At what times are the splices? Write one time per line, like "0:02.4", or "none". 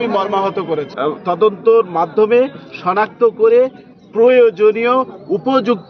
0:00.9